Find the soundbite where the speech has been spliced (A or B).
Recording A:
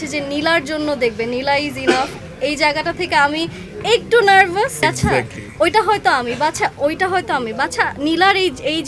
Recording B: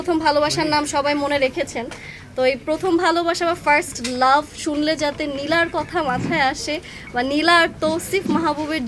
A